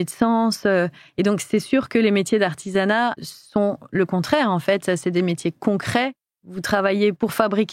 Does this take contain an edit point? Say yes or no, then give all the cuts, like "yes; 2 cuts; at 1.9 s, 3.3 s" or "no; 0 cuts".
no; 0 cuts